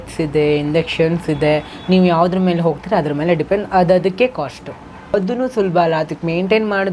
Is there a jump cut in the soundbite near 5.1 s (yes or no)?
yes